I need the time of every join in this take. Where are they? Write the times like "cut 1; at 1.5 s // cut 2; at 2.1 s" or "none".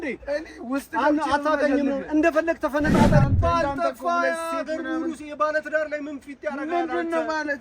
cut 1; at 3.3 s